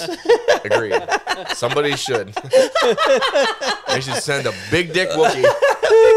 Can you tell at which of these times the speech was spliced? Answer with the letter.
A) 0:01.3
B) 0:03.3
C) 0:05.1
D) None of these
D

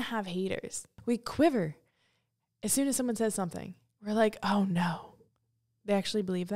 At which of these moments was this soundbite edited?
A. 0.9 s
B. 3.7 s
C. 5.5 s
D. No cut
A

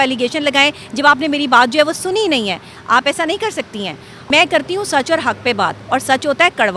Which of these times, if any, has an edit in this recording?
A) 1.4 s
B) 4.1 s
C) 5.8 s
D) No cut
B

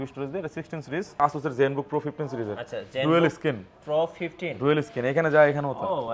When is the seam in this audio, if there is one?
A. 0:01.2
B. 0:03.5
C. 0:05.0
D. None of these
A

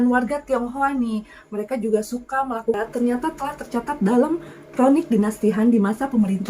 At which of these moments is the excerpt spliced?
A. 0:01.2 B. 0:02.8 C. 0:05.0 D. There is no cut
B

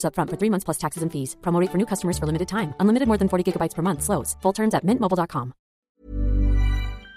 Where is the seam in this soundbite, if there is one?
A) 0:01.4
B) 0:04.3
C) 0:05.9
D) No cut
C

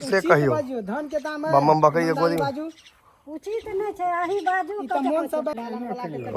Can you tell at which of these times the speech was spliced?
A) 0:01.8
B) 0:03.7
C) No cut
C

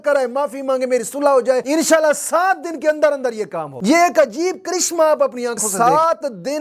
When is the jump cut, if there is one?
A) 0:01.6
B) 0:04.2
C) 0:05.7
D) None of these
C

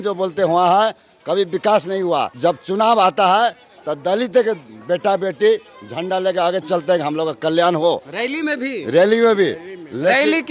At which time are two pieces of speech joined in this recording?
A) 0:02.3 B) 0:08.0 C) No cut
A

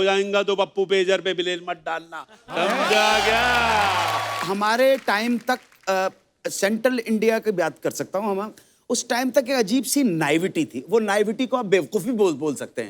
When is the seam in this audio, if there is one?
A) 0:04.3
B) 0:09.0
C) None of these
A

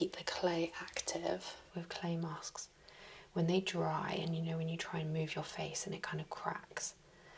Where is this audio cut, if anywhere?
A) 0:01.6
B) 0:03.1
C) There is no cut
A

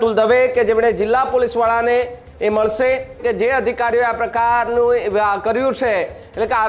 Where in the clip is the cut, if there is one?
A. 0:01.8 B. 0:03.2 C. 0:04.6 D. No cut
B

